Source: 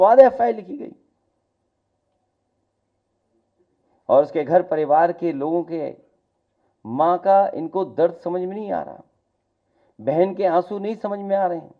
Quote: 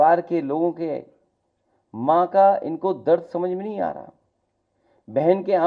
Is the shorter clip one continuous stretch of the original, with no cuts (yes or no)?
yes